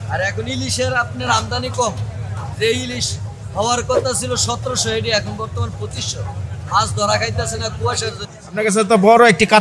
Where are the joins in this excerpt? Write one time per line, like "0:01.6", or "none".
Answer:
0:08.3